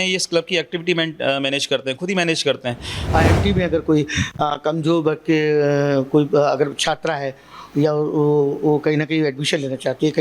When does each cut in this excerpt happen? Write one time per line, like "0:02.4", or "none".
0:03.0